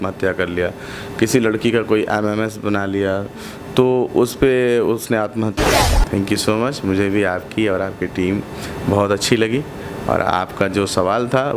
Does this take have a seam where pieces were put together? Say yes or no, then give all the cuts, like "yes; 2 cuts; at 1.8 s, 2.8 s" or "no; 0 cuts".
yes; 1 cut; at 5.7 s